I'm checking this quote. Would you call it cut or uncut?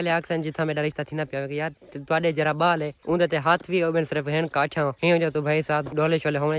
uncut